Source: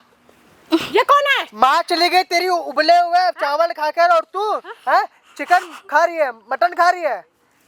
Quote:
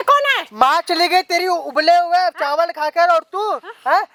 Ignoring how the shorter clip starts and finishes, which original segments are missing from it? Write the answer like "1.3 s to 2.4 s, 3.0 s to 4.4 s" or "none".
none